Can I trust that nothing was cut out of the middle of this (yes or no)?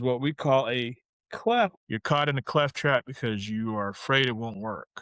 no